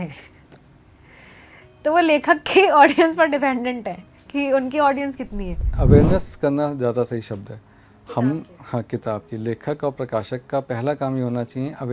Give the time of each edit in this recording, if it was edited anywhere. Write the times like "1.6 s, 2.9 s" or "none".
5.7 s